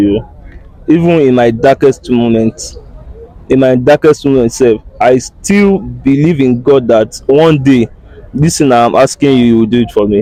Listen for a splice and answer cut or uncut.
uncut